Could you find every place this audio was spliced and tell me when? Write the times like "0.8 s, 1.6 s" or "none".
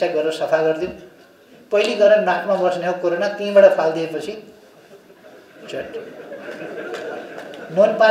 none